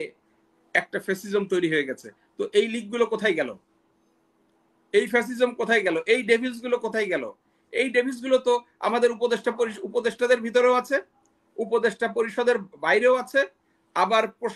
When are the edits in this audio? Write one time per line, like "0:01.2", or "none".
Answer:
none